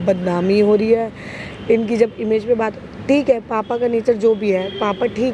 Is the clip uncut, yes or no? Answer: yes